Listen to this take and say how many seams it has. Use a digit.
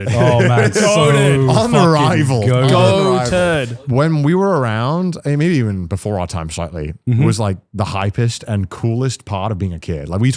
1